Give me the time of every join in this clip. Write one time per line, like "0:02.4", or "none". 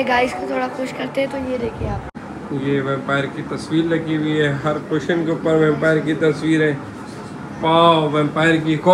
0:02.1